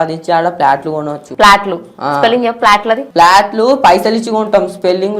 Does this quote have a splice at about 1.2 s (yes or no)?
yes